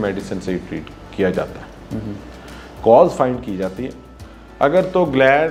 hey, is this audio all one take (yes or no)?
yes